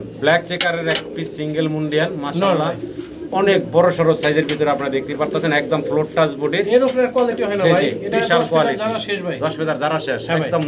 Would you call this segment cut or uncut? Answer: uncut